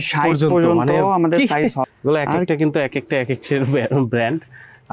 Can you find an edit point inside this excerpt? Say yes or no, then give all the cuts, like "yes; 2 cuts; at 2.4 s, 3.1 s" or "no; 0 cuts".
yes; 1 cut; at 1.9 s